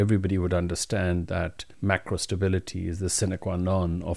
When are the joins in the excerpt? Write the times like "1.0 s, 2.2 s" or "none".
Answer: 1.6 s